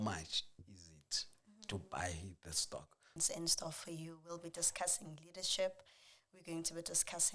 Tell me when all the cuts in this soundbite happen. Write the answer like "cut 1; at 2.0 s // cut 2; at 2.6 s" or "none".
cut 1; at 3.2 s